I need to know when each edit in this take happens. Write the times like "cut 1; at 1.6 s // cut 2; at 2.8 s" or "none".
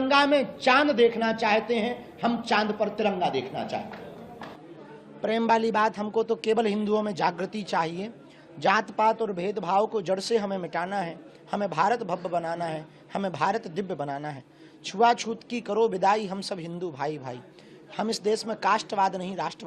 cut 1; at 4.5 s